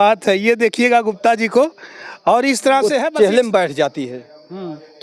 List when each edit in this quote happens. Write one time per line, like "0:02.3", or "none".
0:03.1

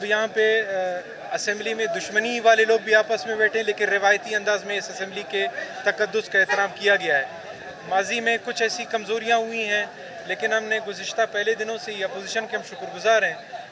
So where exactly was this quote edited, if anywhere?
none

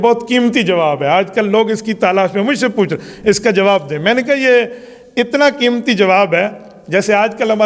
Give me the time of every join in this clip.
none

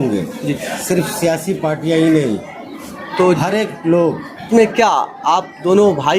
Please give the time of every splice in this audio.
0:04.3

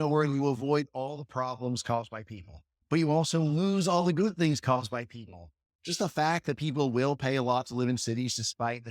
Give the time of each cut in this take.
0:02.7

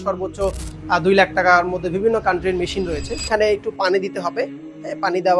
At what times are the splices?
0:03.1

